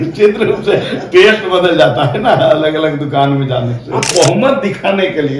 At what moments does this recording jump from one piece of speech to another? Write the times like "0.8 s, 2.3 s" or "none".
4.1 s